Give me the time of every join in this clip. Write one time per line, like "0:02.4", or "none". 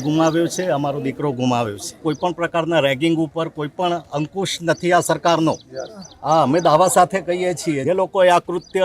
0:02.0
0:07.8